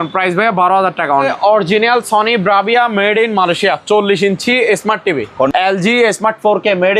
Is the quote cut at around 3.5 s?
no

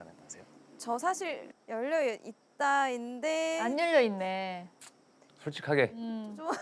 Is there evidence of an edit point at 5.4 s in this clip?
no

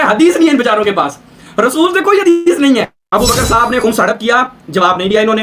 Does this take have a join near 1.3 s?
no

